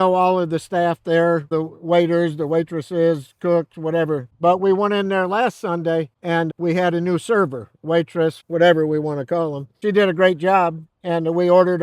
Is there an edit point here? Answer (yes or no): yes